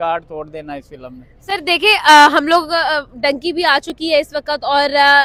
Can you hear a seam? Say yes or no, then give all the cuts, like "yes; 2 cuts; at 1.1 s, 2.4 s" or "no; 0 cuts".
no; 0 cuts